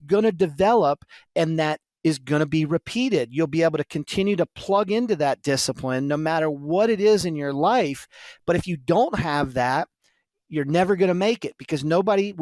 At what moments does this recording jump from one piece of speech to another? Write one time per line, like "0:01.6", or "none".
none